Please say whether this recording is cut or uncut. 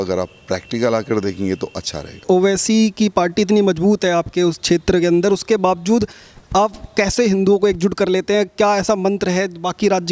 cut